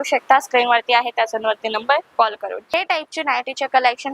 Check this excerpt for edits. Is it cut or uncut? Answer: cut